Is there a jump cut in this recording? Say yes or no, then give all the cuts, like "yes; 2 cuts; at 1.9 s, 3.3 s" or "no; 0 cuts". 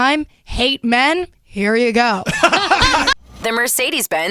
yes; 1 cut; at 3.1 s